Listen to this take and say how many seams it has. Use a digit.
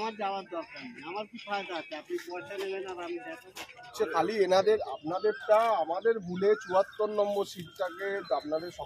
1